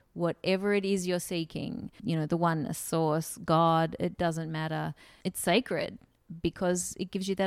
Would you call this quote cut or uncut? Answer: cut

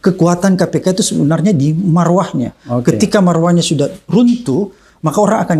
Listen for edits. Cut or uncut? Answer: uncut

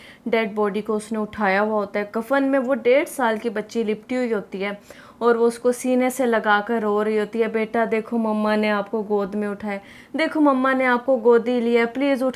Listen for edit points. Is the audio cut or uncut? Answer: uncut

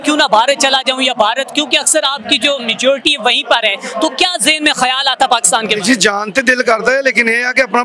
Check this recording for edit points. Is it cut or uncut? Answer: uncut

